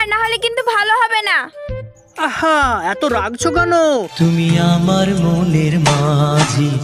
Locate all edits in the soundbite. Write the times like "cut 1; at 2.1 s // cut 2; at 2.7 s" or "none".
cut 1; at 4.1 s